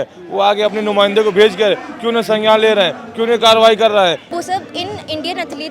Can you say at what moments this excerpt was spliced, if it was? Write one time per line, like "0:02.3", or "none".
0:04.3